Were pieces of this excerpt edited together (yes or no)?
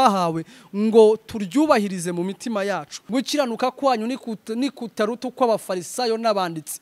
yes